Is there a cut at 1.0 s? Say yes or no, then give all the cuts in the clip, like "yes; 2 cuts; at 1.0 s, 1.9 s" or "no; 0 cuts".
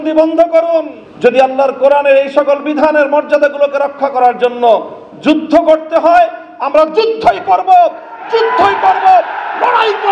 yes; 1 cut; at 1.0 s